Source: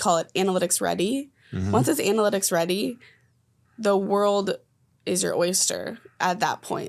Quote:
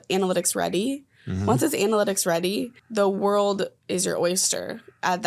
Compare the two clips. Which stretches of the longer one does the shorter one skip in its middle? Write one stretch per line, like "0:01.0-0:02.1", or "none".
0:03.0-0:03.7
0:04.7-0:05.0